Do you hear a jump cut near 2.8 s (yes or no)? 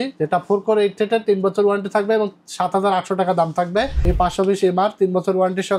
no